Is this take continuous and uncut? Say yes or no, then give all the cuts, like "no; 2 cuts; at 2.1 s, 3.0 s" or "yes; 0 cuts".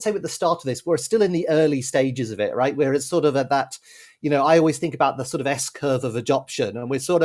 yes; 0 cuts